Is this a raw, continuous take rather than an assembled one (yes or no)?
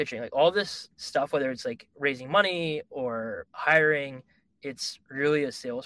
yes